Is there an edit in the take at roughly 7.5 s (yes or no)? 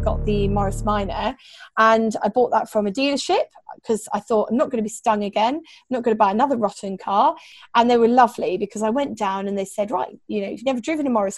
yes